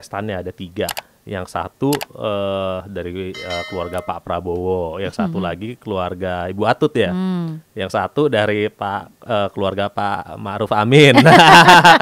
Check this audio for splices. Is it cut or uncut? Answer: uncut